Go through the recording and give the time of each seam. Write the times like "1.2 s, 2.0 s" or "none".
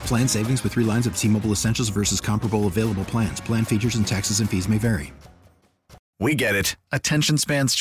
6.0 s